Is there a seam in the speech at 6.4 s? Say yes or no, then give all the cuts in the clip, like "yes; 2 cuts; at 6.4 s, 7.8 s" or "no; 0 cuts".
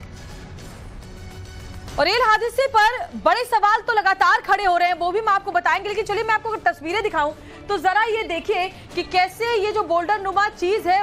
no; 1 cut; at 8.5 s